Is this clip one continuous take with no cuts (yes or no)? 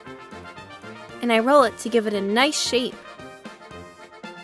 yes